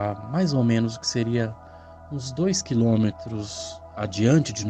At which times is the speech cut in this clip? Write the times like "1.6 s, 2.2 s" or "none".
none